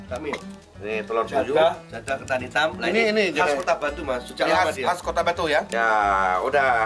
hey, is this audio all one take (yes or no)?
no